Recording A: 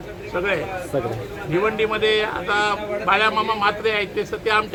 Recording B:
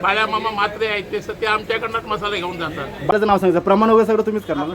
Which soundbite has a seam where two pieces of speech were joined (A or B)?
B